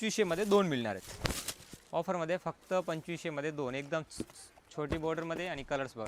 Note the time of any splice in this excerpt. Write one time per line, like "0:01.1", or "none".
none

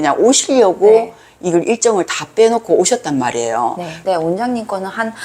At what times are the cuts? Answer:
0:03.9

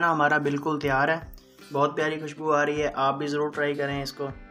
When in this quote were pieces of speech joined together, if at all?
none

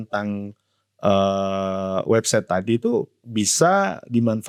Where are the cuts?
none

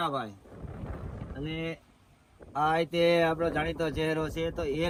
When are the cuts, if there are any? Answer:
none

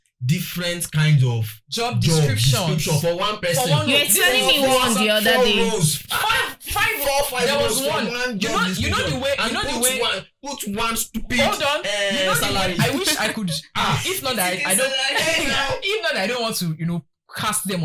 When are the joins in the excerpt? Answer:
none

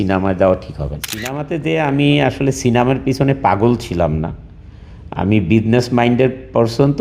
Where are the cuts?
0:01.3

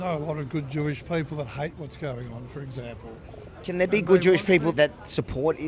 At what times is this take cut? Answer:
none

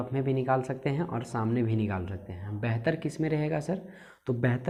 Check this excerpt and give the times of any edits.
none

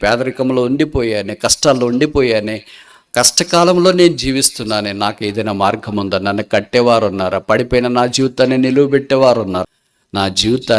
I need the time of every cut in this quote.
0:09.6

